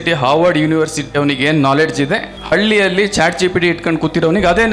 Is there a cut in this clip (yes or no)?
no